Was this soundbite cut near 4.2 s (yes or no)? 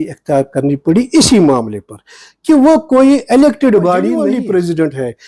yes